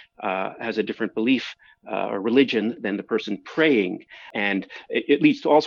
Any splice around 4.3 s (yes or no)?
yes